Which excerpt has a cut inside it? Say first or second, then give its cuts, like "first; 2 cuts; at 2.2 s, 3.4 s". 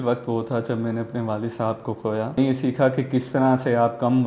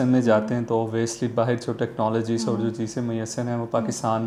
first; 1 cut; at 2.4 s